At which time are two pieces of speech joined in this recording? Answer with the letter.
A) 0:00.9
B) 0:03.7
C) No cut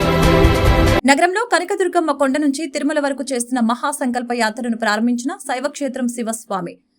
A